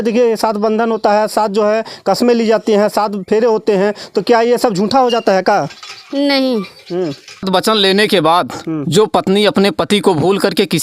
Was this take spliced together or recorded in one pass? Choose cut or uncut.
cut